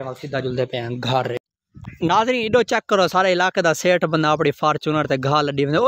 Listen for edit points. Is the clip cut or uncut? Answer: cut